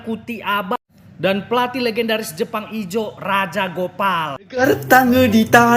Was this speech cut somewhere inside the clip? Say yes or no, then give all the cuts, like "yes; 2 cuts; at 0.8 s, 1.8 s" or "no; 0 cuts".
yes; 1 cut; at 4.6 s